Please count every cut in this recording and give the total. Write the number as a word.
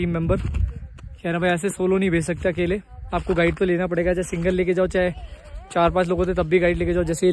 zero